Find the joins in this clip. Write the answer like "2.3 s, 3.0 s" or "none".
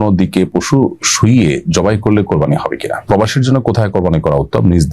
3.1 s